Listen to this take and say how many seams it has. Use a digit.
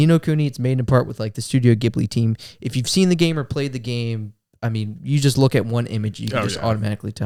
0